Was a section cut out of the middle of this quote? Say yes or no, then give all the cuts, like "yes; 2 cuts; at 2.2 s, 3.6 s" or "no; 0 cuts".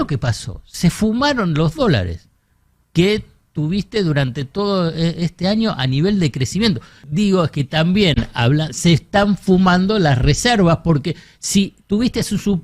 yes; 1 cut; at 7.0 s